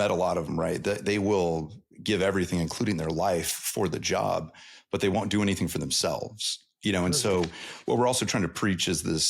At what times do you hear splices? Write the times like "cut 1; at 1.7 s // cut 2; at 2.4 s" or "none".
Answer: none